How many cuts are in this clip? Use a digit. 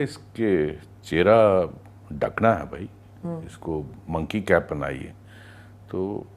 0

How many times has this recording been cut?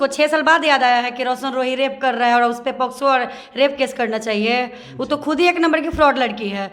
0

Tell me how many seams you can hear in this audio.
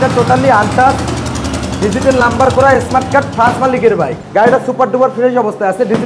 1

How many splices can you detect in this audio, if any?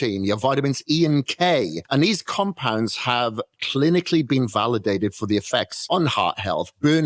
2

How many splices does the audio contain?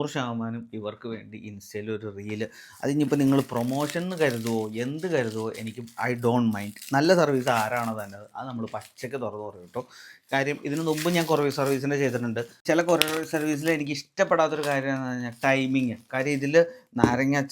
1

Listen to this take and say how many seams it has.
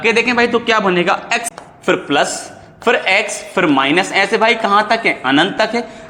1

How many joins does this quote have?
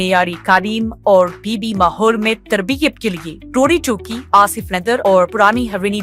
0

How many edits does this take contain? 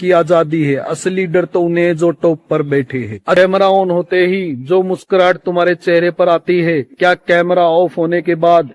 1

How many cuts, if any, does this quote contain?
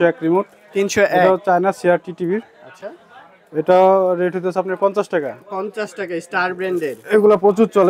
0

